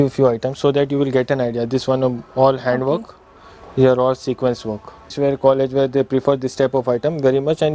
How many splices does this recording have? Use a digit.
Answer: 1